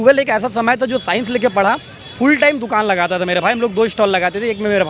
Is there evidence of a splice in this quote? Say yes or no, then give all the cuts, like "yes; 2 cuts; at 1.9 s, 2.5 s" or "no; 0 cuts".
no; 0 cuts